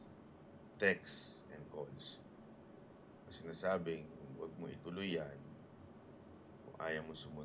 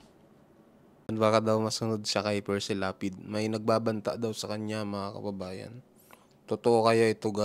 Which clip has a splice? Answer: second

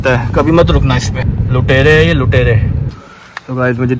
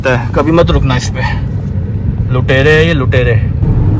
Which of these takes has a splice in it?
first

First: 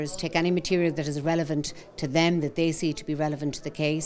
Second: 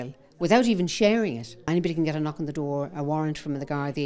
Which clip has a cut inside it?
second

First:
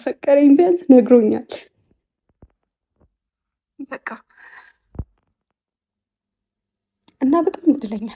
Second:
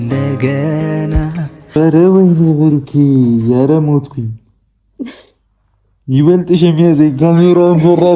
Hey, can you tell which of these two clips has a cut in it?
second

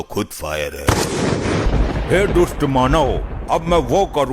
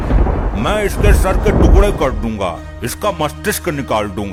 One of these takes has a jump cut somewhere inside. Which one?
first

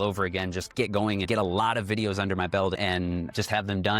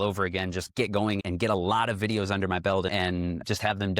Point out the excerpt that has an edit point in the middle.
first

